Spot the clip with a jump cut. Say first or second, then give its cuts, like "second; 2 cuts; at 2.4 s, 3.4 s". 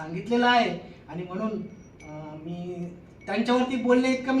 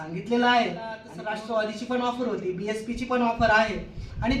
second; 1 cut; at 1.1 s